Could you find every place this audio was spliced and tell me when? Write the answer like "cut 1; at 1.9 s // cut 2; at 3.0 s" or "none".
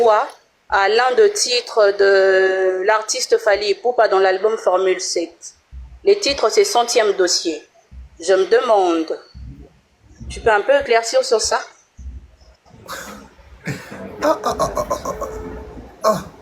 none